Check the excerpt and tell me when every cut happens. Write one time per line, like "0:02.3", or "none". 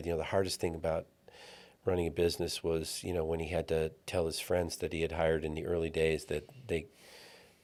none